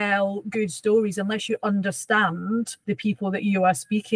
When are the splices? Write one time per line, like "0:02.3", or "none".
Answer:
0:02.8